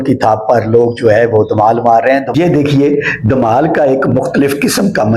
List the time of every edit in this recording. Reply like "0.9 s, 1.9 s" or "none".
2.3 s